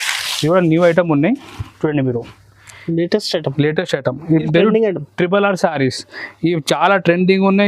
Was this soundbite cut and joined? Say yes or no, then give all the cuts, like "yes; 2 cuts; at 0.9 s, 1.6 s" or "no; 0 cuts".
yes; 1 cut; at 4.2 s